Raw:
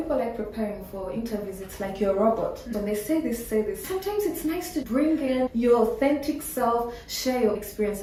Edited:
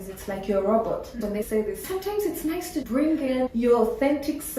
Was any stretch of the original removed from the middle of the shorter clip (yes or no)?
yes